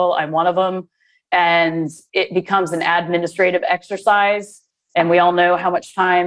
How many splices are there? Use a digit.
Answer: 1